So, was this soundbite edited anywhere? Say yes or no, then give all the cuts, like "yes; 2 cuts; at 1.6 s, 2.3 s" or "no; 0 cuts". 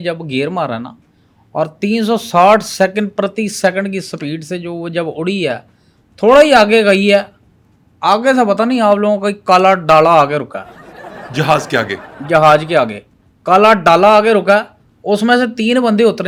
no; 0 cuts